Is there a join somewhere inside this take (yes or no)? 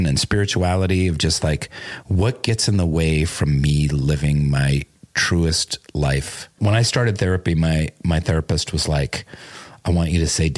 yes